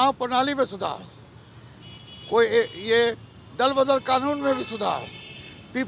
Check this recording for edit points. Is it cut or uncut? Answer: uncut